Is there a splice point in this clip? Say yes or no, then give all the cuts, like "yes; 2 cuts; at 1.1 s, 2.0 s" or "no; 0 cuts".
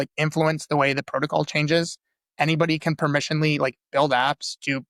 no; 0 cuts